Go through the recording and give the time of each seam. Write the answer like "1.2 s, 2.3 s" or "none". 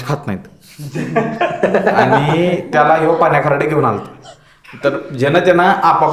none